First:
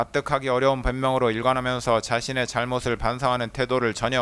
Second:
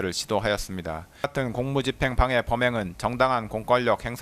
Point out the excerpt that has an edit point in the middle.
second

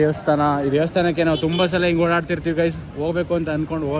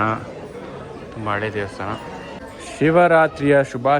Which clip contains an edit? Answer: second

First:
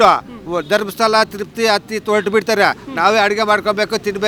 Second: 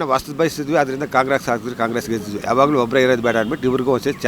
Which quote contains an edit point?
second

